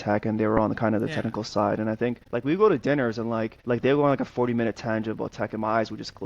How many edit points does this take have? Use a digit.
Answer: 2